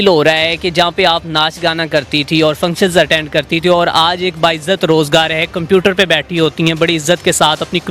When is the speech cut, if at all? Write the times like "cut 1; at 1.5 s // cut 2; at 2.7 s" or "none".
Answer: none